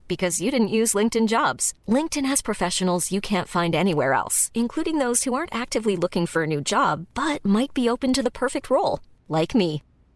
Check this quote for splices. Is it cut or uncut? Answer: uncut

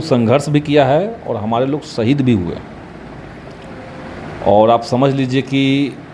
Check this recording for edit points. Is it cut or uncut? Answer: uncut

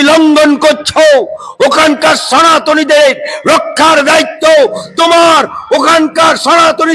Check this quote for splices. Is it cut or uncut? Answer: uncut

